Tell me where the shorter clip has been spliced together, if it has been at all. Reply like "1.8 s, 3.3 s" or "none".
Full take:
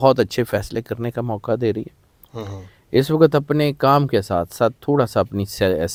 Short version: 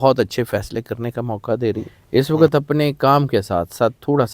1.9 s